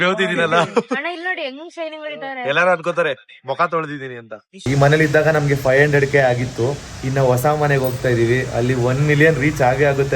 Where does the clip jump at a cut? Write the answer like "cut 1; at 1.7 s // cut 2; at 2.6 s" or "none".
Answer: cut 1; at 4.6 s